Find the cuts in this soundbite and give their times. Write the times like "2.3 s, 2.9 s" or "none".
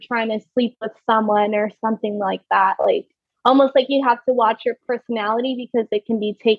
none